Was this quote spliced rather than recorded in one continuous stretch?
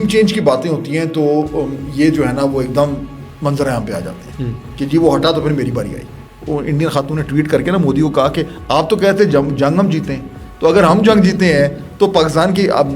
yes; 1 cut; at 6.4 s

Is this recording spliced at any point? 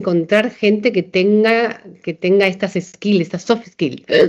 no; 0 cuts

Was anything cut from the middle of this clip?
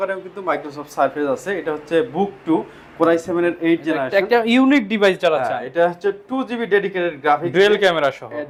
no; 0 cuts

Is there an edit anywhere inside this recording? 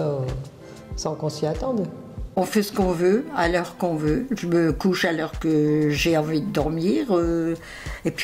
yes; 1 cut; at 2.4 s

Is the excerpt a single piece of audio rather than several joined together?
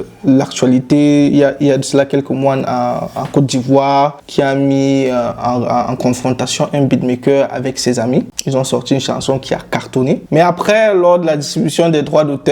no; 3 cuts; at 4.2 s, 8.4 s, 10.2 s

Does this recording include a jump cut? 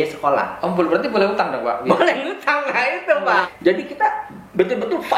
yes; 1 cut; at 3.5 s

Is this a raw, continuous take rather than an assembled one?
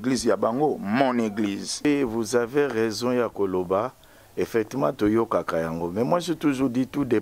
no; 1 cut; at 1.8 s

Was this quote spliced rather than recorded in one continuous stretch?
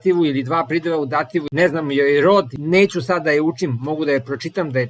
yes; 2 cuts; at 1.5 s, 2.5 s

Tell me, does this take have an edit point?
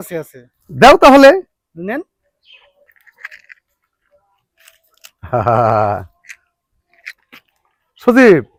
no; 0 cuts

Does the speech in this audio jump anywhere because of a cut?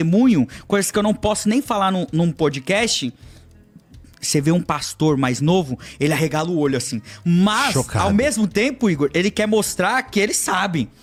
no; 0 cuts

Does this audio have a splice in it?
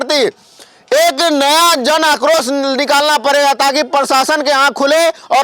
no; 0 cuts

